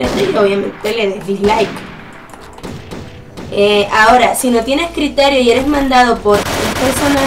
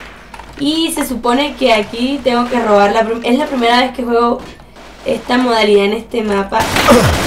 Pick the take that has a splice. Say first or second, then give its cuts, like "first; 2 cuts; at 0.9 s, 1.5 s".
second; 1 cut; at 3.9 s